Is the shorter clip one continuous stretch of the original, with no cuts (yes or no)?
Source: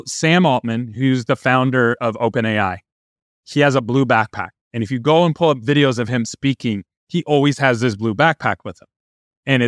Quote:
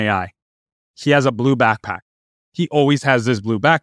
no